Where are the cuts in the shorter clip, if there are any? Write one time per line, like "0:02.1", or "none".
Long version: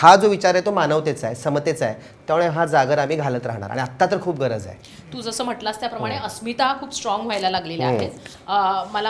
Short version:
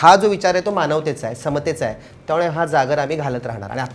none